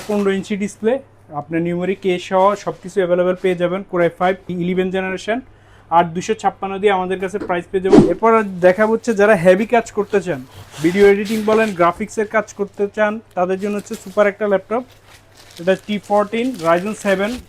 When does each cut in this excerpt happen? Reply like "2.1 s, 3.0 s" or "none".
4.5 s, 8.0 s